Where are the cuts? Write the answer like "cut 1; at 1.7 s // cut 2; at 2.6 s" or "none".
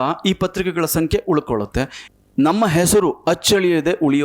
cut 1; at 2.0 s

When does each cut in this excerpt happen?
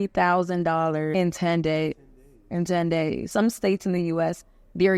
cut 1; at 1.1 s // cut 2; at 3.2 s

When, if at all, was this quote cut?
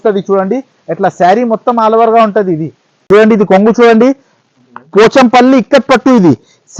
cut 1; at 3.1 s

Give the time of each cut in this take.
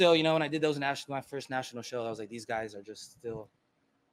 none

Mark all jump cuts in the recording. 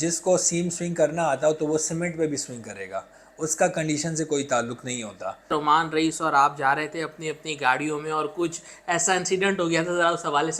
cut 1; at 5.5 s

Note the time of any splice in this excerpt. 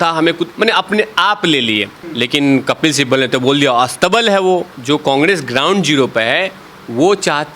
cut 1; at 2.0 s // cut 2; at 4.7 s

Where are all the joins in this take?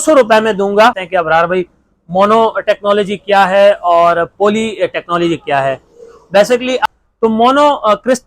cut 1; at 1.0 s // cut 2; at 6.8 s

